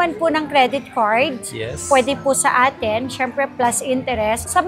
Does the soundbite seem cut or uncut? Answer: uncut